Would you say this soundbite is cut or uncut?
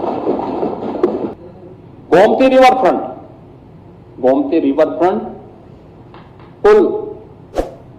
cut